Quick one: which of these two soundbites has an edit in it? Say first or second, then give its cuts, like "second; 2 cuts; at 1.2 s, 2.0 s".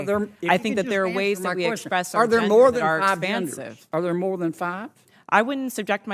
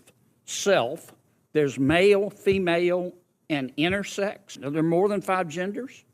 second; 1 cut; at 4.6 s